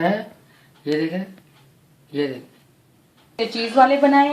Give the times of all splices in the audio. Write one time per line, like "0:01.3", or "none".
0:03.3